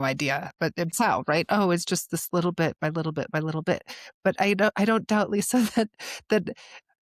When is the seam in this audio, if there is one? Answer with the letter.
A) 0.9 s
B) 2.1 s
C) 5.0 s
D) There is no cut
A